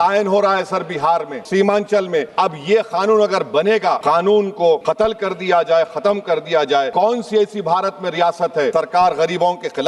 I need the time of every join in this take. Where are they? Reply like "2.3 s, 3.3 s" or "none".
1.4 s, 2.3 s, 4.0 s, 4.8 s, 6.9 s, 8.7 s